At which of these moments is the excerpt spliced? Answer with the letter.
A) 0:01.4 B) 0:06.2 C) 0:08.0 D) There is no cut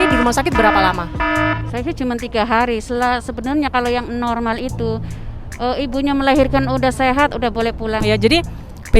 C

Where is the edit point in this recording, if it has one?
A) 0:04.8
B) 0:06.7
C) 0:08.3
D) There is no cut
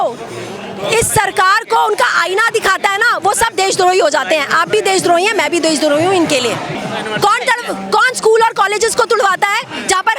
B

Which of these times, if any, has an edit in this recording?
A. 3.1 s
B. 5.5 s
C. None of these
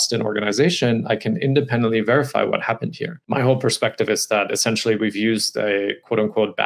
A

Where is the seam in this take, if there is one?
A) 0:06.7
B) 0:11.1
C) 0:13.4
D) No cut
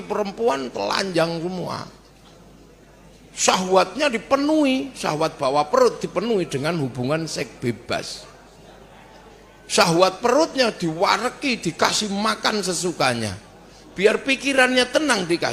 D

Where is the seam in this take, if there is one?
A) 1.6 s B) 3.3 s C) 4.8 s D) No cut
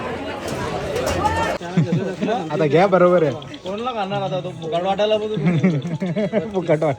A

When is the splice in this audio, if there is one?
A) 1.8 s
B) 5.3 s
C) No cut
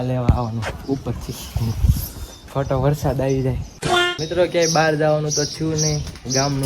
C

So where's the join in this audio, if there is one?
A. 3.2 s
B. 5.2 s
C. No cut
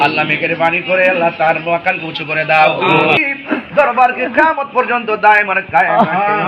A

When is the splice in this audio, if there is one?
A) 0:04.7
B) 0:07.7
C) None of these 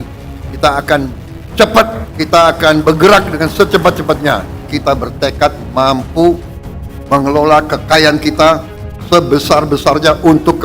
A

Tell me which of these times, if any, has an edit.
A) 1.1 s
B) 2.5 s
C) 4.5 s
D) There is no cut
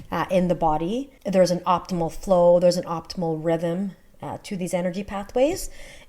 A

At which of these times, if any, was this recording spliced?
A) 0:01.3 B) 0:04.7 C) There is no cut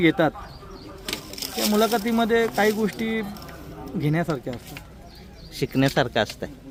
C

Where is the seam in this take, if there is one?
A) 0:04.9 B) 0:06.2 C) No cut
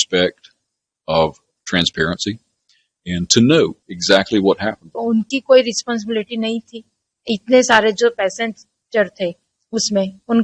A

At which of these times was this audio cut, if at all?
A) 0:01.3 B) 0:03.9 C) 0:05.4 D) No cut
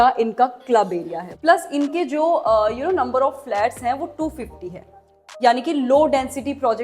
A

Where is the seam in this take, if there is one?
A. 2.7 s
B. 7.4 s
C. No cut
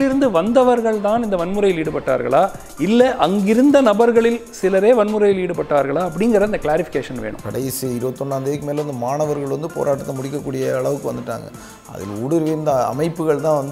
B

